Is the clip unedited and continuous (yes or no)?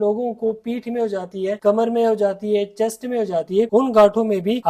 yes